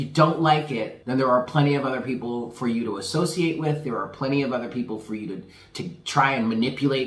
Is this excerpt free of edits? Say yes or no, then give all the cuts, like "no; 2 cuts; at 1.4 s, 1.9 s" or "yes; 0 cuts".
no; 1 cut; at 1.0 s